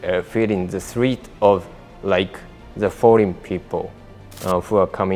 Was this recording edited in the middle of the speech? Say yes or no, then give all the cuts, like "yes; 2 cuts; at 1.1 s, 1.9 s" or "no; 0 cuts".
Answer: no; 0 cuts